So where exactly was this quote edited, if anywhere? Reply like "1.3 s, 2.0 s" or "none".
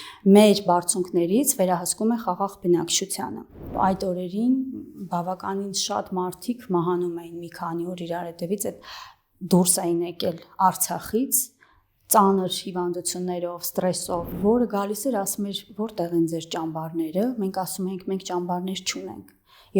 3.7 s, 14.3 s